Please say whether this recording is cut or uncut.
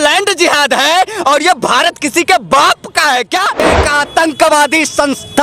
cut